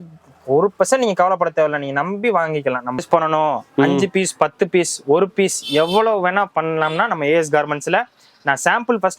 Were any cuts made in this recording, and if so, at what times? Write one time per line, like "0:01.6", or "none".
0:03.0

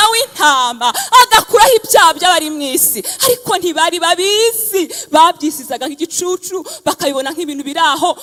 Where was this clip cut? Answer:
none

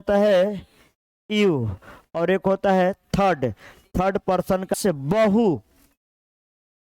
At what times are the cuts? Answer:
0:04.7

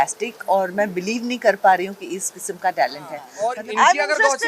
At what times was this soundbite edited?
0:03.3

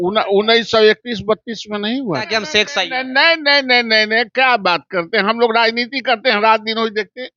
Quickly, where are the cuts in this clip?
0:02.3

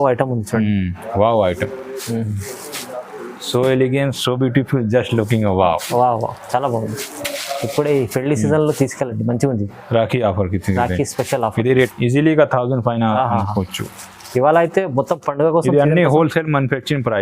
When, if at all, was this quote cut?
0:07.1
0:11.9

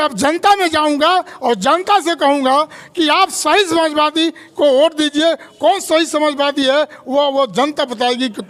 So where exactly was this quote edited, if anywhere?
none

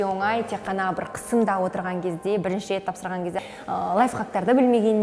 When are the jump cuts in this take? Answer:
0:03.3

